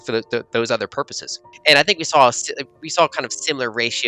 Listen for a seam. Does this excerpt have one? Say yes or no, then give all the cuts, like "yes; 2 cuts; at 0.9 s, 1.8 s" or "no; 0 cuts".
yes; 1 cut; at 1.4 s